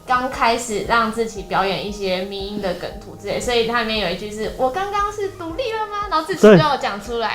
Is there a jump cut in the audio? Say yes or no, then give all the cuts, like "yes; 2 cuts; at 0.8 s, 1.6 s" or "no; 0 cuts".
no; 0 cuts